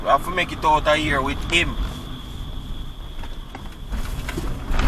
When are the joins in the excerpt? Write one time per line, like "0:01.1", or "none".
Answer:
none

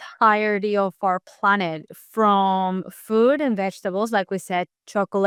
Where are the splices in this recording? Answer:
none

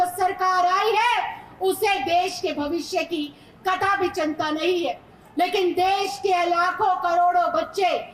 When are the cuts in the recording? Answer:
0:05.1

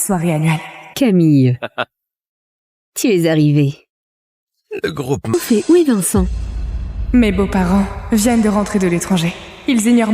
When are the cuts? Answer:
0:05.3

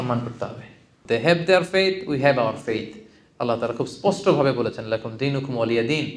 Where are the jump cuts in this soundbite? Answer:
0:00.9

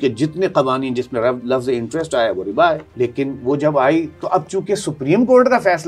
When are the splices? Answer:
0:02.9

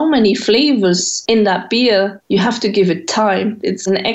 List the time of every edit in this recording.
0:01.1
0:02.2

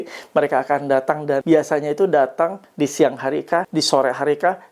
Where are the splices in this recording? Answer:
0:01.4
0:03.7

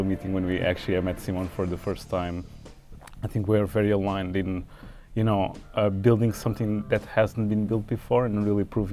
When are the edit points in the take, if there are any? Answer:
none

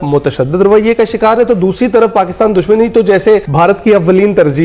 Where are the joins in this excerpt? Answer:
0:03.5

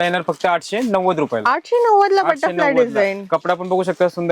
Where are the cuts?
none

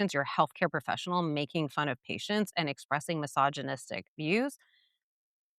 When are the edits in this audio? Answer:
none

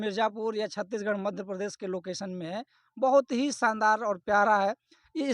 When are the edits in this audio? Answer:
none

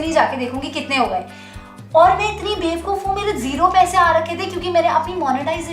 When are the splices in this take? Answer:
none

